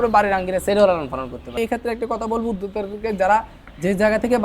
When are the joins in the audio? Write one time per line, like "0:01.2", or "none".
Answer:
0:01.6